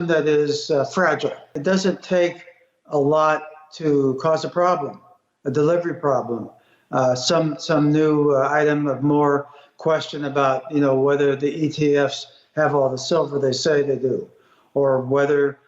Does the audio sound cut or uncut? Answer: cut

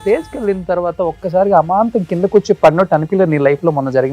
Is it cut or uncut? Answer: uncut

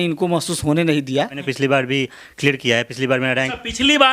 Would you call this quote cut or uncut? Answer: cut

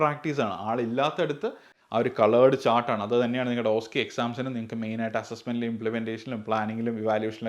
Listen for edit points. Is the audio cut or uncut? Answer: cut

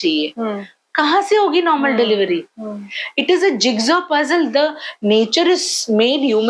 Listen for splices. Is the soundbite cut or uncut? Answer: uncut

